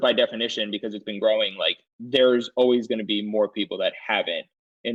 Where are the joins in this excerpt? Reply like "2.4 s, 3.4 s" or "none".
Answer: none